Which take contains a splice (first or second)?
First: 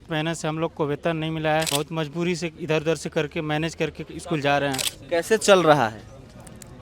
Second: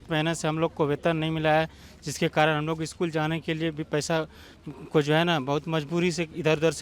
first